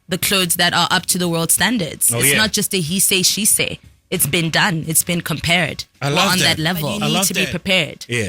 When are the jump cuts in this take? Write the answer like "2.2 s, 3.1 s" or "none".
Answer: 7.3 s

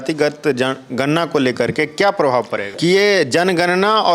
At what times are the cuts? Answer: 2.6 s

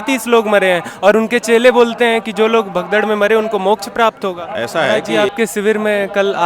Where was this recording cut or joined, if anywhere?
5.0 s

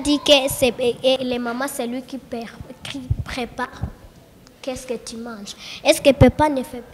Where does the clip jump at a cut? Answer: 1.2 s

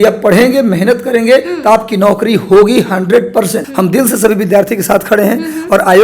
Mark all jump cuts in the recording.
3.6 s

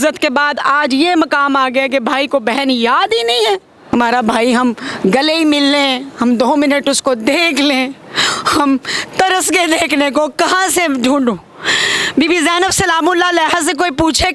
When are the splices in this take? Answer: 3.7 s

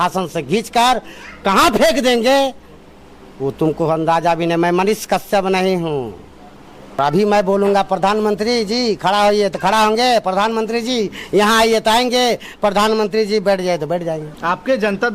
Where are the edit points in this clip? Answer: 7.0 s, 14.3 s

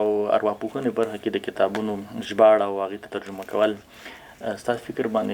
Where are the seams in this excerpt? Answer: none

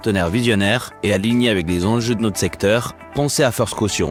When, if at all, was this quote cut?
none

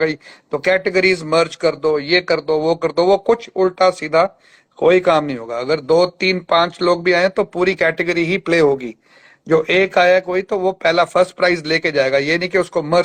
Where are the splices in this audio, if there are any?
none

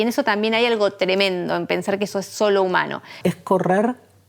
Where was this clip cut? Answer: 3.2 s

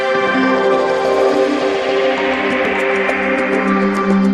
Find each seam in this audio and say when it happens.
none

